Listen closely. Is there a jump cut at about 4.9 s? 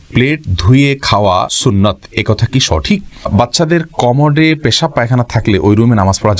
no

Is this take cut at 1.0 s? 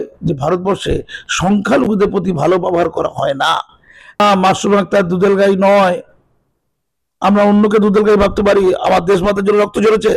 no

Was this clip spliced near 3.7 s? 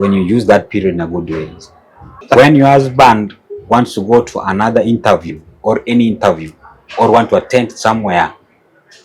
no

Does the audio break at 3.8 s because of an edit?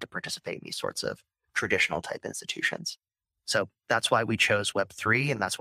no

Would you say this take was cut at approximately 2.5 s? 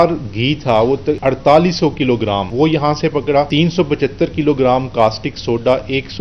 yes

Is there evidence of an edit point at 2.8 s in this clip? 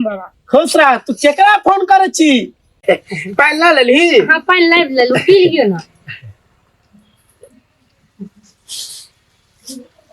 yes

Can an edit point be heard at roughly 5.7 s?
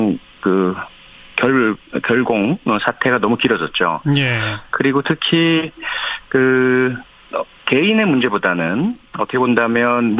yes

